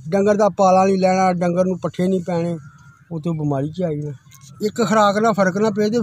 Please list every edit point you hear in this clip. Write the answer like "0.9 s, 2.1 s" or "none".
4.4 s